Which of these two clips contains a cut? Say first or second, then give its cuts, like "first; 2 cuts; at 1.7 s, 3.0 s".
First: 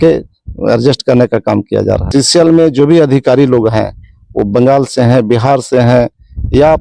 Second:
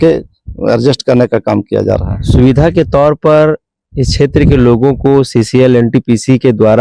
first; 1 cut; at 2.0 s